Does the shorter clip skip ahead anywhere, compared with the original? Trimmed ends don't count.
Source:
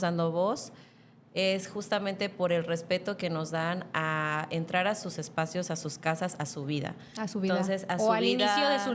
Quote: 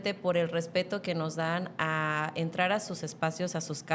no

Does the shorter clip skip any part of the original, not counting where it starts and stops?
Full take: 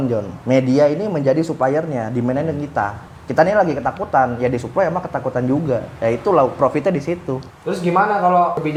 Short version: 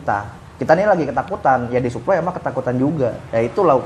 no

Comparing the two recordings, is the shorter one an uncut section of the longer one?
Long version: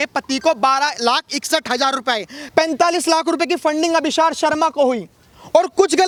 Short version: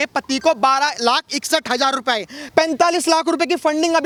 yes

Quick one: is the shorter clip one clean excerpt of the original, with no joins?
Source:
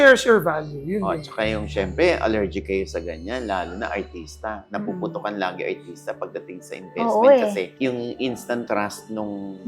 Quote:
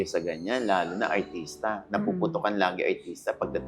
yes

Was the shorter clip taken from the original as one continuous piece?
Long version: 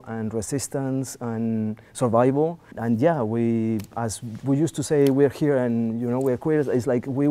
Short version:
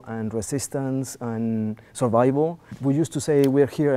no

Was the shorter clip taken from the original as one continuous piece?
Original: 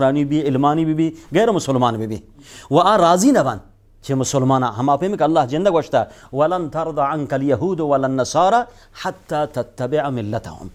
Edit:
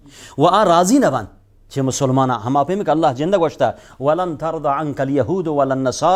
yes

